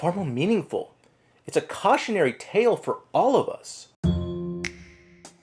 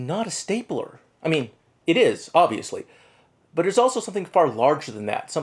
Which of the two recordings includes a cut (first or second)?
first